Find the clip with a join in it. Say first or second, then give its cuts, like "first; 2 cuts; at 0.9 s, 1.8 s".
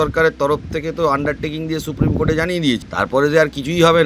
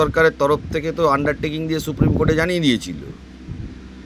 first; 1 cut; at 2.9 s